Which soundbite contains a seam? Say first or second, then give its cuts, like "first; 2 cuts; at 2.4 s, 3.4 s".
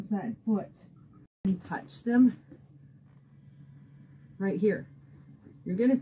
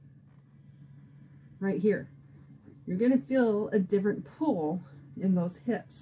first; 1 cut; at 1.5 s